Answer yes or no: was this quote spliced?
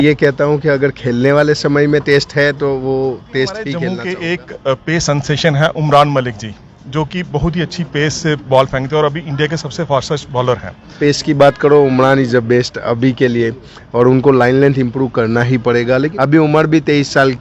yes